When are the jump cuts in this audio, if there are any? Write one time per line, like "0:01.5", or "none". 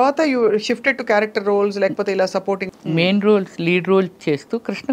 0:02.7